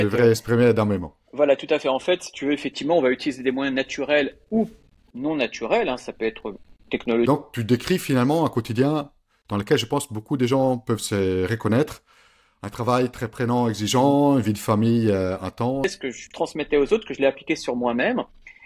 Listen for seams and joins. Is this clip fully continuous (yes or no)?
no